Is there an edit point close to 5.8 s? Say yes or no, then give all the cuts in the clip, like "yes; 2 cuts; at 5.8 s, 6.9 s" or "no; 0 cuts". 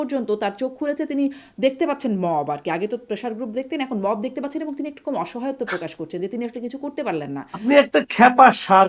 no; 1 cut; at 7.6 s